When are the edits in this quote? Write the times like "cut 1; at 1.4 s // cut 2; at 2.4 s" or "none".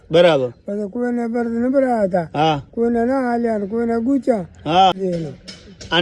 cut 1; at 4.9 s